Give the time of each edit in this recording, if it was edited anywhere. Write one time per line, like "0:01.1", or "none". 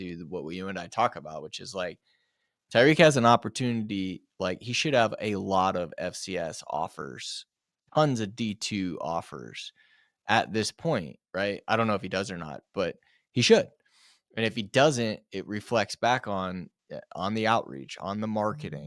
none